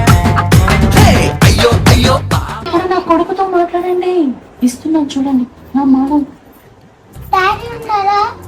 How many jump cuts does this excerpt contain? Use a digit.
1